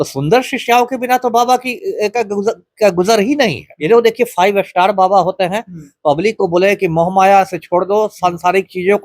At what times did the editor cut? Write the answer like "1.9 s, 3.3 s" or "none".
3.7 s